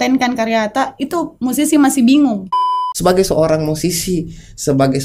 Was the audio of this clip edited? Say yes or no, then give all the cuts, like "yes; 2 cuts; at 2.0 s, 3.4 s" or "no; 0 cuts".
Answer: yes; 1 cut; at 2.7 s